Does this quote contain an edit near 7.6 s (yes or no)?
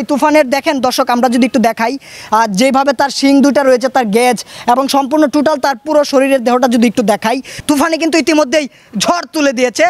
yes